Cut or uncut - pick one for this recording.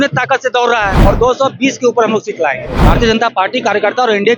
cut